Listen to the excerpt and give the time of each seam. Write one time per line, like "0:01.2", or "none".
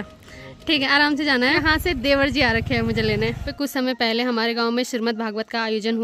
0:01.6
0:03.5